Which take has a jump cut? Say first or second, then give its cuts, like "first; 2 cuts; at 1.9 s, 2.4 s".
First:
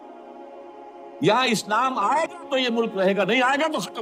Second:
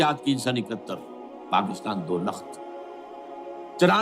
first; 1 cut; at 1.0 s